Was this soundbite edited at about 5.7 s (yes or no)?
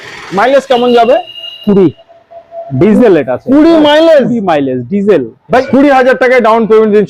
yes